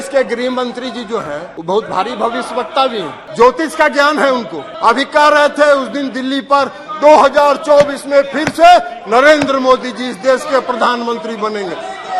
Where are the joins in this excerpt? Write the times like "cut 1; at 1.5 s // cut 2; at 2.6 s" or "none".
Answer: cut 1; at 1.5 s // cut 2; at 3.2 s // cut 3; at 4.6 s